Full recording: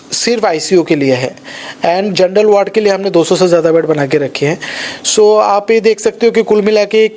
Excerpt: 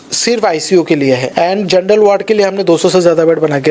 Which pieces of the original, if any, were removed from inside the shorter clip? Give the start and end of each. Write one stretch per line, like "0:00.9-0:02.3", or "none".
0:01.3-0:01.7